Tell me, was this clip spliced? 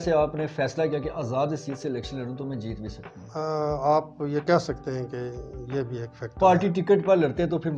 no; 0 cuts

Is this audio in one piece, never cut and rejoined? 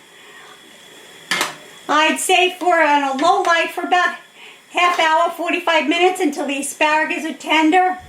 yes; 0 cuts

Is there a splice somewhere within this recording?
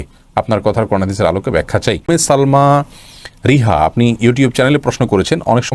yes; 1 cut; at 2.0 s

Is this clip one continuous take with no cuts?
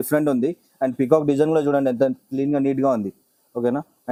yes; 0 cuts

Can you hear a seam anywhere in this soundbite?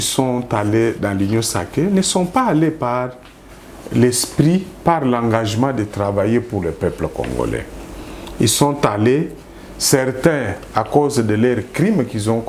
no; 0 cuts

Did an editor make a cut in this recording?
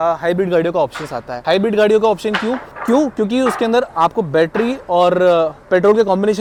no; 0 cuts

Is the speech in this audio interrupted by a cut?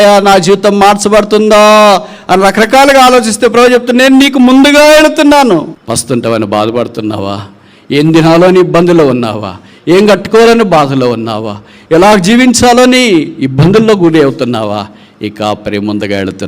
yes; 1 cut; at 5.7 s

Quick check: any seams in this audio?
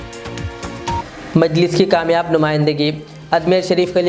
yes; 1 cut; at 1.0 s

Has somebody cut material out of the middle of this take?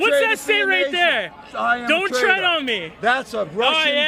no; 0 cuts

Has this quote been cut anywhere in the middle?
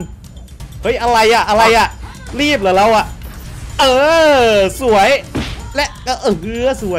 no; 0 cuts

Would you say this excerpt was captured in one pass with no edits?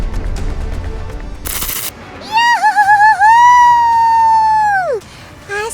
no; 1 cut; at 2.1 s

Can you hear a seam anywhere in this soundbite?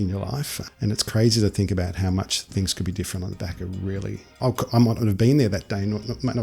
yes; 1 cut; at 4.3 s

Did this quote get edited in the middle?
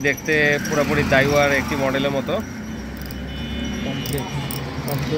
no; 0 cuts

